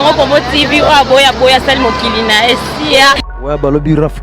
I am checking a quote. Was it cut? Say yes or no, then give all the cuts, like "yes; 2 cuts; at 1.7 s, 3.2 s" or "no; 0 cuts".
yes; 1 cut; at 3.2 s